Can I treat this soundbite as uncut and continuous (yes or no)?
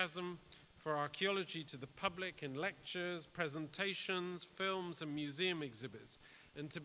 yes